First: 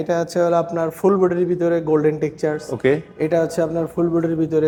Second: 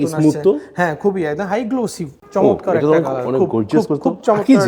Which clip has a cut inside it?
second; 1 cut; at 2.1 s

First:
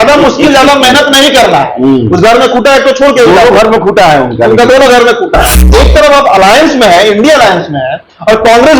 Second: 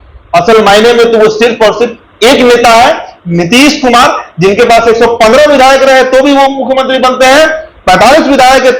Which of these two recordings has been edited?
first; 1 cut; at 5.6 s

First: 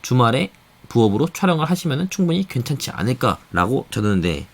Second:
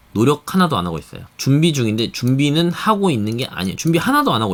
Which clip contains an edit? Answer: first; 1 cut; at 3.4 s

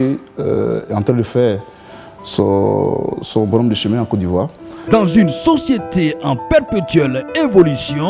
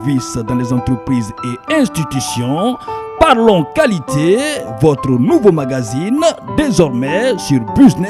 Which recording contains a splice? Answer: first; 1 cut; at 4.6 s

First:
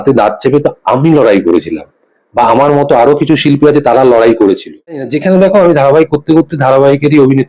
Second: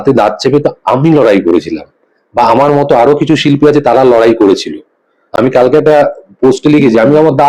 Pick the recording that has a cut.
first; 1 cut; at 5.1 s

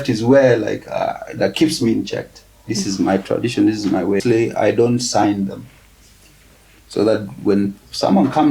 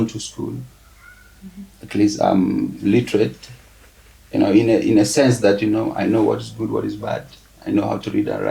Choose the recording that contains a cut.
first; 1 cut; at 4.2 s

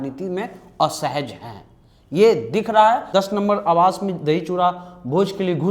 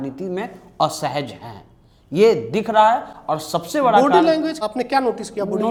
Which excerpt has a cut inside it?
first; 1 cut; at 3.0 s

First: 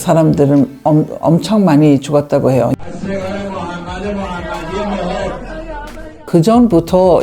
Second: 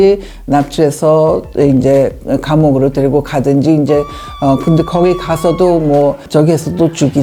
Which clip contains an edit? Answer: first; 1 cut; at 2.7 s

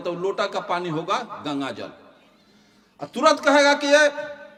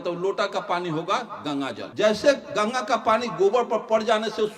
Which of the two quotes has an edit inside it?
second; 1 cut; at 1.8 s

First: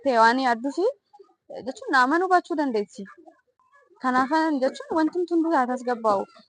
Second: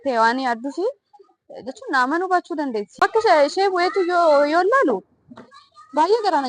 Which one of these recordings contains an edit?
second; 1 cut; at 2.9 s

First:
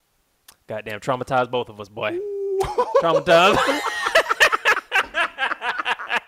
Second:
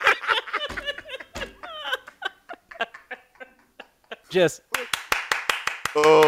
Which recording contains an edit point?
second; 1 cut; at 4.2 s

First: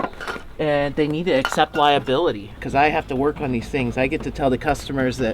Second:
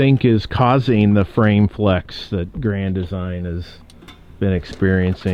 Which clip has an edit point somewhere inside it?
first; 1 cut; at 2.6 s

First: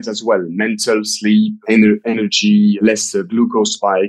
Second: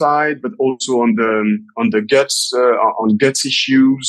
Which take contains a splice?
first; 2 cuts; at 1.6 s, 2.7 s

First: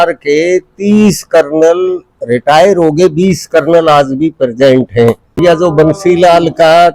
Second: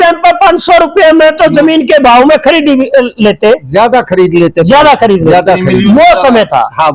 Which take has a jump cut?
first; 1 cut; at 5.4 s

